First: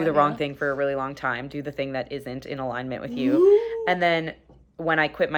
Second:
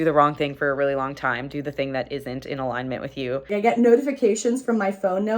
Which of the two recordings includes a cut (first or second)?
second